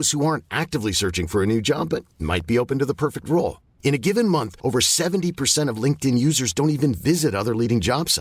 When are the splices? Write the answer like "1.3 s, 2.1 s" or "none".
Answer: none